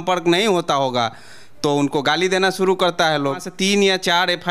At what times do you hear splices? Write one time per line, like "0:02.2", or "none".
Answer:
0:03.5